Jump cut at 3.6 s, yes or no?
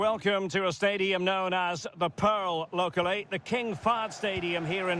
no